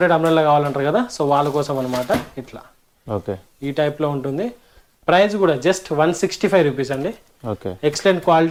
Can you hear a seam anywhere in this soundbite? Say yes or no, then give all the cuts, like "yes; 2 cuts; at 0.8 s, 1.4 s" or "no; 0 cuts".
no; 0 cuts